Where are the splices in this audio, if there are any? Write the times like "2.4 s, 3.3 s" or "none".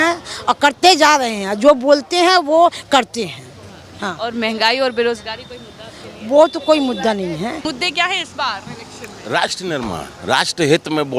7.7 s